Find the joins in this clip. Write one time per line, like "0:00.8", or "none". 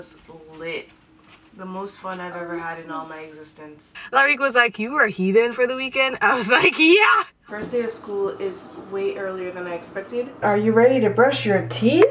0:04.0
0:07.5
0:10.4

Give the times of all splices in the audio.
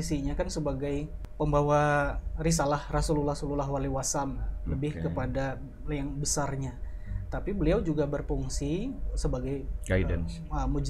0:01.2

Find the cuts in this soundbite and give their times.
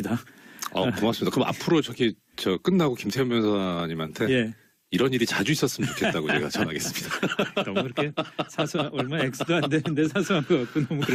none

